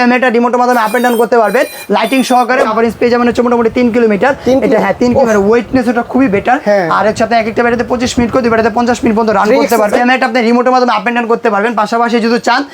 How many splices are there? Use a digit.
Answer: 2